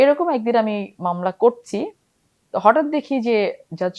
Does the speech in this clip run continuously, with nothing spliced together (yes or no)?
yes